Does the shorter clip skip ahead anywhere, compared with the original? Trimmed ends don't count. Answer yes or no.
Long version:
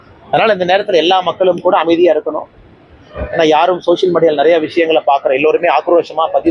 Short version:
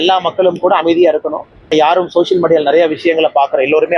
yes